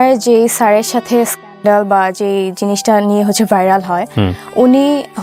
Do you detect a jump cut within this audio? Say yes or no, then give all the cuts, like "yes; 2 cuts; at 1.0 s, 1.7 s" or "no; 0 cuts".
no; 0 cuts